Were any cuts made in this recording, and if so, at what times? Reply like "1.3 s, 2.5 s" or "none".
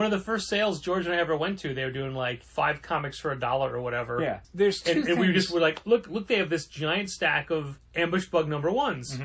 2.4 s, 4.4 s, 7.8 s